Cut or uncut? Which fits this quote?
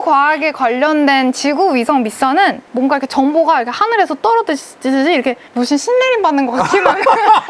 cut